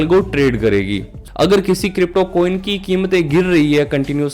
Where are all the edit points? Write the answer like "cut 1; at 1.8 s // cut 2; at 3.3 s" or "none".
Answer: cut 1; at 1.2 s